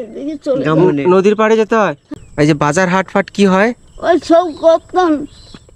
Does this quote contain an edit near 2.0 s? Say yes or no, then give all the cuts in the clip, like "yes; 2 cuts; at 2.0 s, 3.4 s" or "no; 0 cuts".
yes; 1 cut; at 2.0 s